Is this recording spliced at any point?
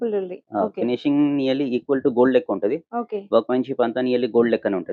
no; 0 cuts

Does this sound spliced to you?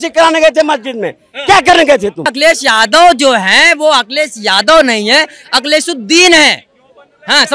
yes; 1 cut; at 2.3 s

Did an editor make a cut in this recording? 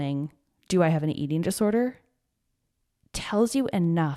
no; 0 cuts

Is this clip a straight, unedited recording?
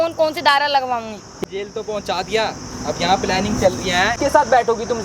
no; 2 cuts; at 1.4 s, 4.2 s

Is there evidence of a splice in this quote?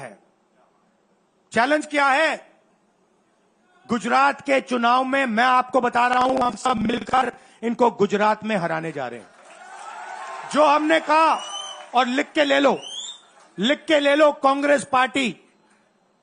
no; 0 cuts

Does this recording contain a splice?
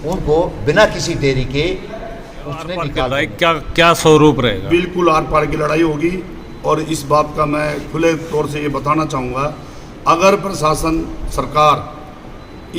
yes; 1 cut; at 3.0 s

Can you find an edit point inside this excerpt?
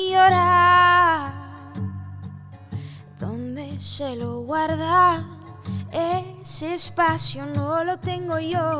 no; 0 cuts

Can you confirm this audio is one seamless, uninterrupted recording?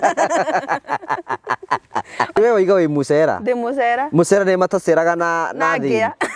no; 1 cut; at 2.4 s

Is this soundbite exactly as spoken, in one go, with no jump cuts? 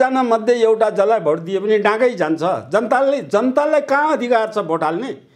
yes; 0 cuts

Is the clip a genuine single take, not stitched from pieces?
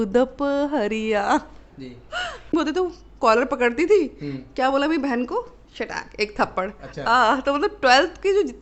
no; 1 cut; at 2.5 s

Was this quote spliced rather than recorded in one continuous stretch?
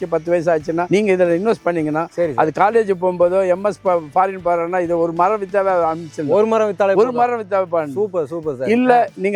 no; 0 cuts

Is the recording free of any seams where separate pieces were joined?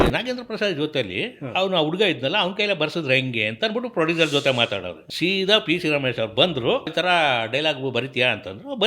no; 2 cuts; at 5.0 s, 6.9 s

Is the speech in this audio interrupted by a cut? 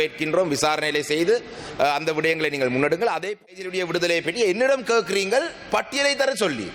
yes; 1 cut; at 3.4 s

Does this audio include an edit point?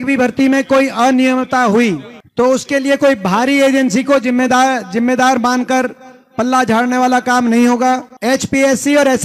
no; 0 cuts

